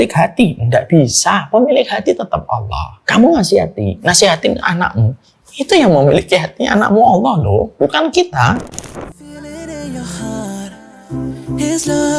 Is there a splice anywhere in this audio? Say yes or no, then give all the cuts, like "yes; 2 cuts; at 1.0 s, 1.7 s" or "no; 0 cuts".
yes; 1 cut; at 8.6 s